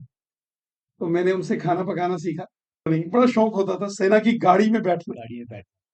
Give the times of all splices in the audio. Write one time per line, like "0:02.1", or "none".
0:02.9